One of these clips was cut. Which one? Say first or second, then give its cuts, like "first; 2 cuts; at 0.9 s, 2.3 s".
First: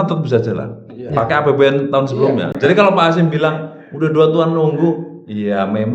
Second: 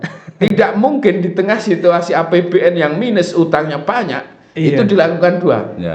first; 1 cut; at 2.5 s